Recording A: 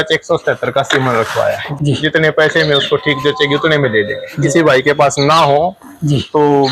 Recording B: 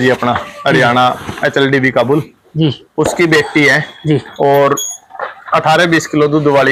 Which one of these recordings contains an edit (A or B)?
A